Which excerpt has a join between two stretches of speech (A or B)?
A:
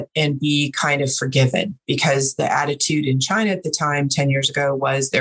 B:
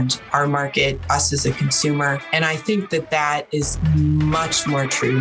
B